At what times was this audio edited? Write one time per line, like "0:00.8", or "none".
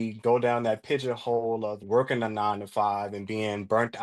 none